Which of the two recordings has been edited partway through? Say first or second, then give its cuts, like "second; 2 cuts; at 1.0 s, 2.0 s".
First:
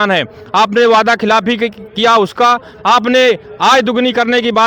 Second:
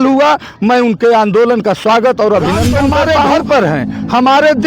second; 1 cut; at 3.4 s